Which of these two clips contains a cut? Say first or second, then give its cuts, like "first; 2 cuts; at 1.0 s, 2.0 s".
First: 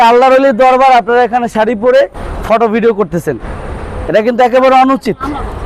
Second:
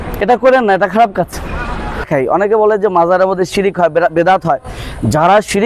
second; 1 cut; at 2.1 s